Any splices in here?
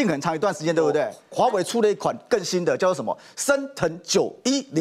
yes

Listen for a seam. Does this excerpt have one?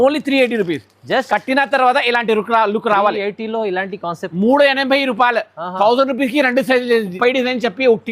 yes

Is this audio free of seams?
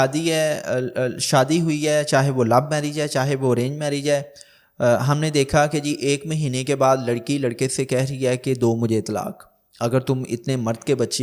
yes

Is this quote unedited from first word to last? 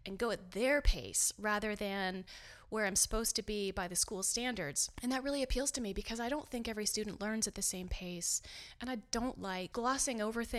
no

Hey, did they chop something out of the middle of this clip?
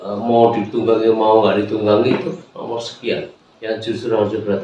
yes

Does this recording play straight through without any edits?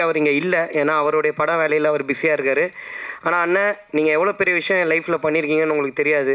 yes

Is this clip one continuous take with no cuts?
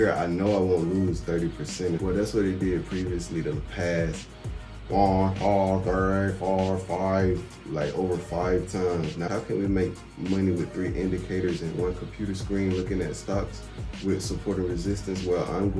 no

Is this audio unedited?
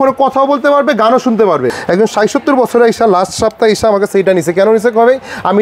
yes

